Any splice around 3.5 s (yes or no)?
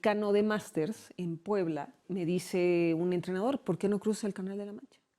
no